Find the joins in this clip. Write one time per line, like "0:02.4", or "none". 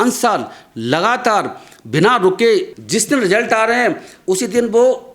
0:02.8